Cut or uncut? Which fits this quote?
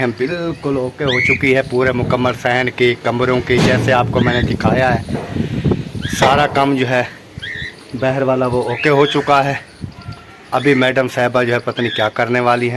uncut